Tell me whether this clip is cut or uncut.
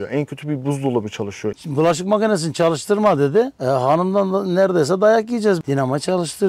cut